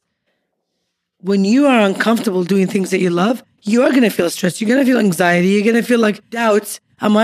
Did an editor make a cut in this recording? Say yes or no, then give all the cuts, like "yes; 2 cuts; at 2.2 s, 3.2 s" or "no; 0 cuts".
yes; 1 cut; at 6.3 s